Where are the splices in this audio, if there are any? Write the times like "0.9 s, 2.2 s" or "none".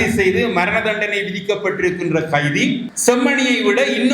2.9 s